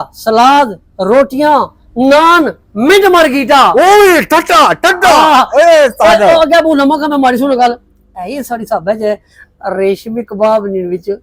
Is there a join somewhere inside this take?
no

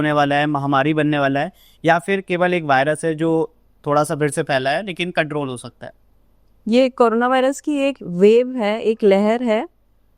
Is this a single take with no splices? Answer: yes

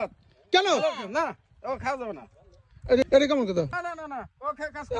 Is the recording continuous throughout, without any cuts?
no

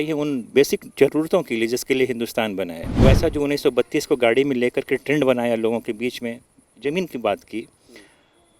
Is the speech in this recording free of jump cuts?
no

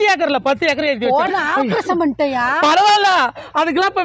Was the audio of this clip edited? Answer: yes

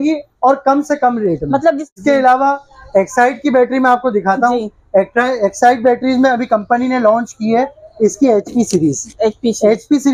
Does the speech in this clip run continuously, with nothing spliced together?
yes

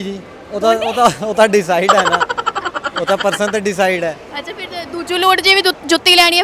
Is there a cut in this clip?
no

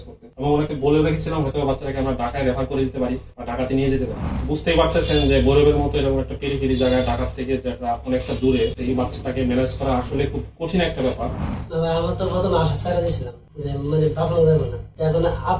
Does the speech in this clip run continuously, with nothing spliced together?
no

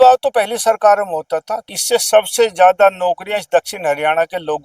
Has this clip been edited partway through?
yes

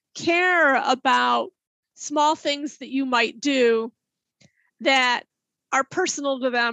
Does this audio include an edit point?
no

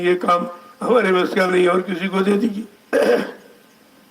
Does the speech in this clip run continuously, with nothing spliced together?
yes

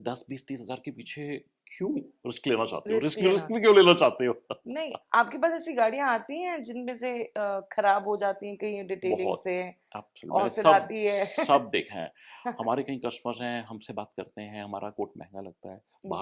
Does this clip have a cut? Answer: no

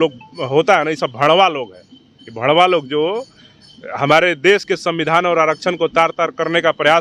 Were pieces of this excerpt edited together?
no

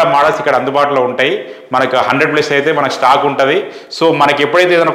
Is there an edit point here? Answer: no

